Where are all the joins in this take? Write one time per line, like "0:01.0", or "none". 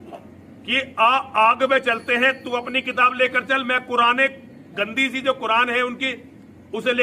none